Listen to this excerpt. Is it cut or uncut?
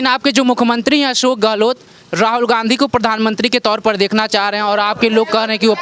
uncut